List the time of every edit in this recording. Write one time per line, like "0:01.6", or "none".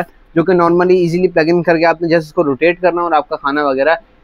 none